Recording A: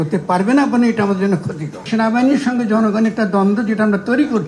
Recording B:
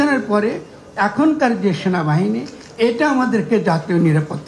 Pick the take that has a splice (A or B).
A